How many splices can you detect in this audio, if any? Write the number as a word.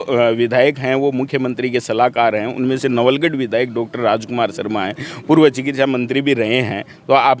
zero